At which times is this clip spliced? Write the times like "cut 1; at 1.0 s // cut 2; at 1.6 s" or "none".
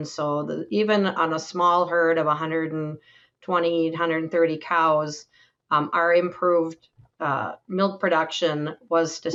none